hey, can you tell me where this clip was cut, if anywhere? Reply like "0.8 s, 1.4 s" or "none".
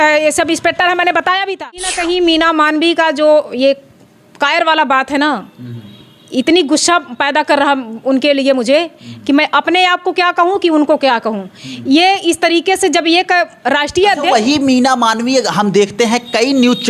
2.0 s